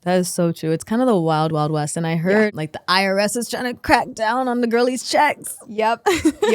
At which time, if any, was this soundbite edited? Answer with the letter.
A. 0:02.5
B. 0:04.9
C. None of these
A